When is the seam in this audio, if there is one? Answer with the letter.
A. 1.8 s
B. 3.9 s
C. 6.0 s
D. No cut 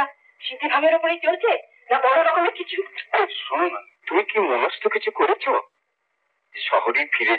B